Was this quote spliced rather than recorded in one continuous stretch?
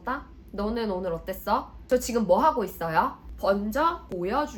no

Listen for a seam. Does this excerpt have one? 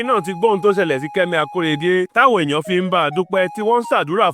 no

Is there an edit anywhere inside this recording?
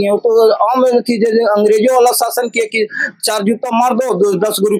no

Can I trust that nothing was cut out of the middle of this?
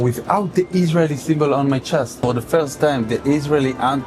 no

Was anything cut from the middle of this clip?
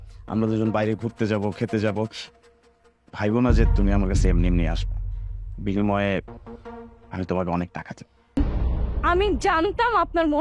yes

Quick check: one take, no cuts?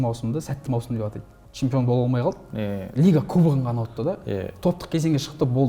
yes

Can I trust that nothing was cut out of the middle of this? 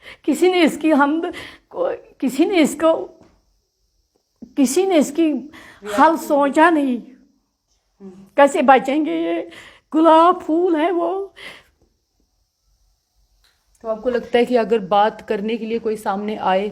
yes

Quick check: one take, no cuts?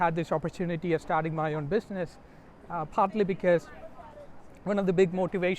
yes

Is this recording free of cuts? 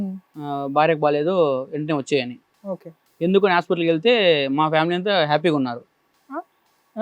no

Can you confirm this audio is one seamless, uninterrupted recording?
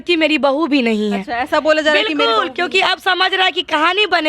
yes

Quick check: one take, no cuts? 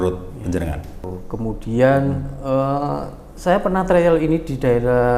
no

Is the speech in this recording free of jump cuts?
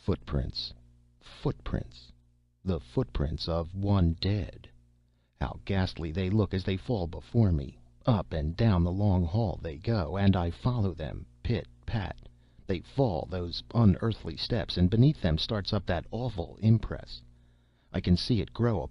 yes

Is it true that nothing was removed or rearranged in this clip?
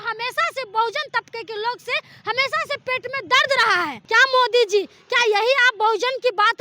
no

